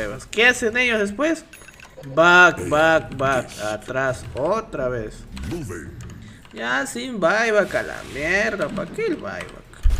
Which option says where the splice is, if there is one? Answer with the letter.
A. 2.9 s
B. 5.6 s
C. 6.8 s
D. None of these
D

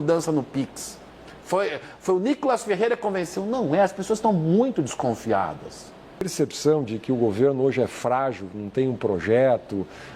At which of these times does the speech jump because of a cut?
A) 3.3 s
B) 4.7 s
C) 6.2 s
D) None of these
C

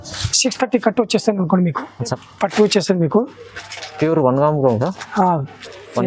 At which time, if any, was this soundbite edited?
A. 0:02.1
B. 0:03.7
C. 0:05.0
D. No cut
A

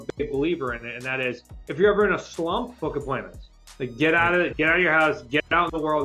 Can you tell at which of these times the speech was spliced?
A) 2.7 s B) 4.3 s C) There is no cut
A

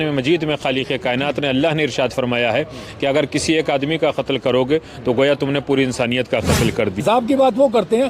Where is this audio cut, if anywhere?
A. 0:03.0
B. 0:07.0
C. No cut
B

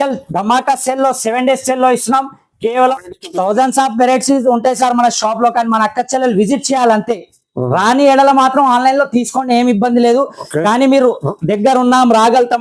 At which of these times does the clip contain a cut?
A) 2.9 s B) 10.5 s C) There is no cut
A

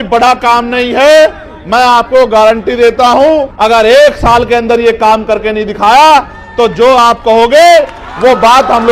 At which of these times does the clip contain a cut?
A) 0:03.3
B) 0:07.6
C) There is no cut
A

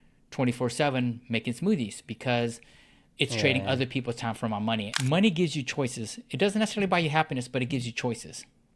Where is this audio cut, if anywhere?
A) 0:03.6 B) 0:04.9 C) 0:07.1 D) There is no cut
B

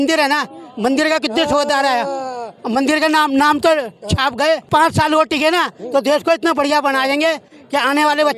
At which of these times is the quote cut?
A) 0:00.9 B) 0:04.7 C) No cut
B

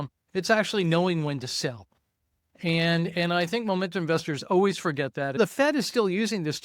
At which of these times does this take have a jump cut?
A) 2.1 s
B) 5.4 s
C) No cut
B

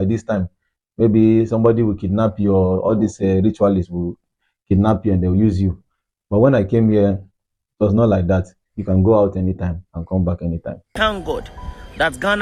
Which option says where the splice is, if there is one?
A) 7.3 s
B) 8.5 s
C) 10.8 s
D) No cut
C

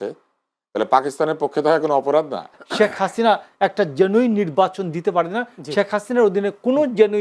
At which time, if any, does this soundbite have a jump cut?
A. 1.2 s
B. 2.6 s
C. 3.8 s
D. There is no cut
B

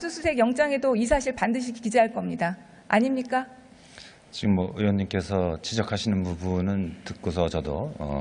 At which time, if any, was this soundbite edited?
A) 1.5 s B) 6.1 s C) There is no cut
C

